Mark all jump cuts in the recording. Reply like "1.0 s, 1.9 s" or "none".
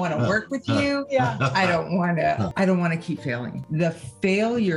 2.5 s, 3.5 s